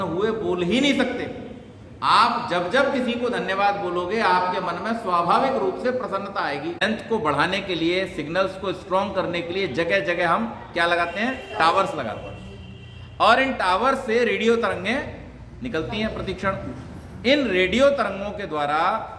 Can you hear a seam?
yes; 1 cut; at 6.8 s

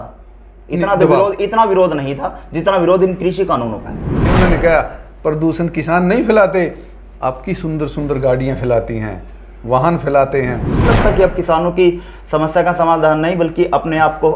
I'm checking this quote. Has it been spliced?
yes; 2 cuts; at 4.3 s, 10.8 s

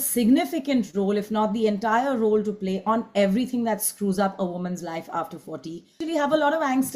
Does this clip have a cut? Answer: yes; 1 cut; at 6.0 s

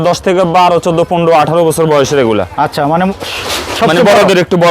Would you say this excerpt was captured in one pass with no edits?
yes; 0 cuts

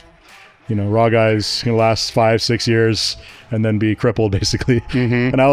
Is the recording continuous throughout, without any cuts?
yes; 0 cuts

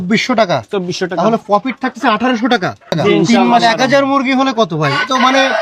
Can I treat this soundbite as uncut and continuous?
no; 1 cut; at 3.6 s

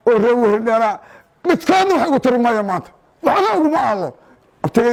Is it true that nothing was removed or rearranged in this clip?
yes; 0 cuts

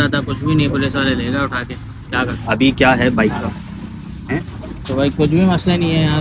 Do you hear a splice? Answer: no; 0 cuts

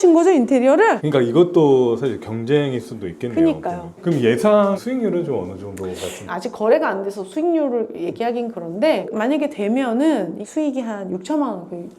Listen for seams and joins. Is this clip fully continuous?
no; 2 cuts; at 1.0 s, 9.1 s

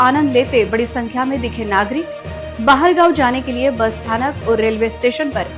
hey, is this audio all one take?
yes; 0 cuts

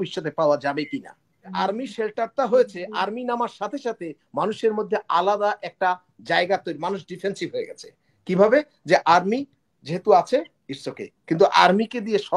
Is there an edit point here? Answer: yes; 1 cut; at 1.5 s

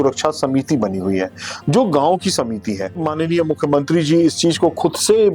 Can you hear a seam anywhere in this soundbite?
yes; 1 cut; at 3.0 s

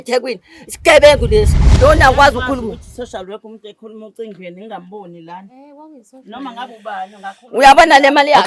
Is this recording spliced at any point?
yes; 1 cut; at 1.6 s

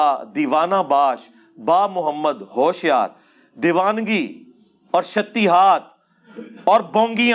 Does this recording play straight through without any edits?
yes; 0 cuts

